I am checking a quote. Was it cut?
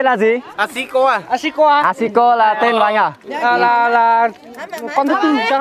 no; 0 cuts

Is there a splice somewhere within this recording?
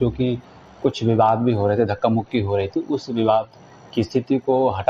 yes; 1 cut; at 1.6 s

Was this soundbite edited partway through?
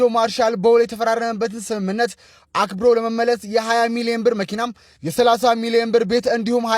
no; 0 cuts

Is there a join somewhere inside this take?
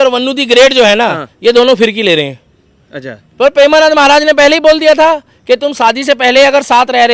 no; 0 cuts

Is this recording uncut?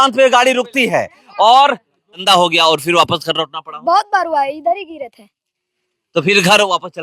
no; 1 cut; at 2.2 s

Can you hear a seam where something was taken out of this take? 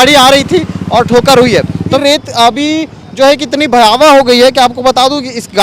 yes; 1 cut; at 2.0 s

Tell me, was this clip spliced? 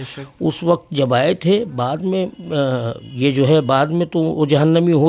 no; 0 cuts

